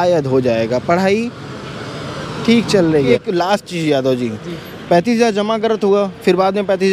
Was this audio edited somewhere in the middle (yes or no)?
yes